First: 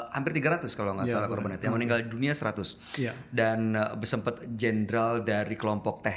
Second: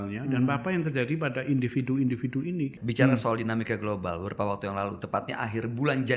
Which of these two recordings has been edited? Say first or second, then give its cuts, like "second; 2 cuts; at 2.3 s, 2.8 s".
second; 1 cut; at 2.8 s